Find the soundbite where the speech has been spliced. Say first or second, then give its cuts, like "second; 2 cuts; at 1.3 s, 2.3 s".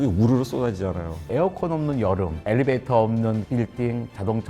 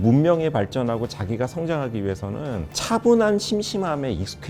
first; 1 cut; at 1.2 s